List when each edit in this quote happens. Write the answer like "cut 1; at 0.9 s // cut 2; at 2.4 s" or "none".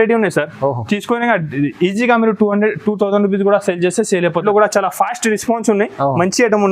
cut 1; at 4.4 s